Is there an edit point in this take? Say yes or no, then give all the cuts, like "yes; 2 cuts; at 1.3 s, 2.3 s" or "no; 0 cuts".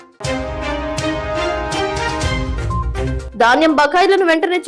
yes; 1 cut; at 3.1 s